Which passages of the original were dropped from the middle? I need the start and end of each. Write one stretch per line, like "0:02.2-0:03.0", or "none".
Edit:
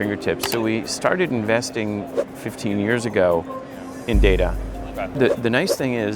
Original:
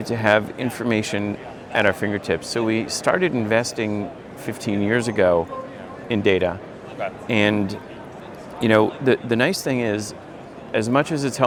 0:07.1-0:09.0